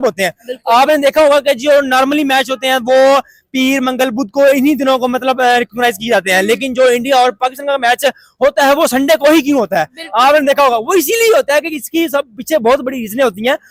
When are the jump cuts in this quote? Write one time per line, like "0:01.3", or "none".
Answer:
none